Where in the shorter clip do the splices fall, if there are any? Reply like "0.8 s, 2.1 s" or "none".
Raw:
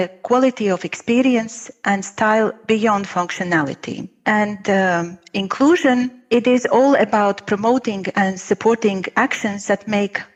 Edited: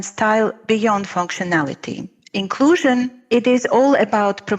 2.1 s